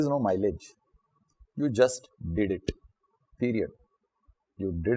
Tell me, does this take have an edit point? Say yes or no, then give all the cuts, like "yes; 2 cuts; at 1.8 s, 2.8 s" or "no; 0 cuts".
no; 0 cuts